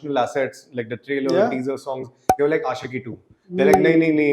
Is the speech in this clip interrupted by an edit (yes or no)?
no